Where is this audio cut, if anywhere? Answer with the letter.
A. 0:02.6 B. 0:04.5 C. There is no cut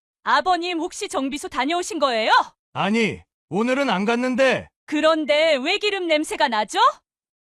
A